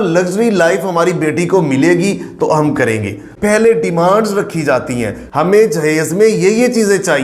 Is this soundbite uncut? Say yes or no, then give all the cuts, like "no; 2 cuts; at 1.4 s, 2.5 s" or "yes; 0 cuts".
no; 1 cut; at 3.2 s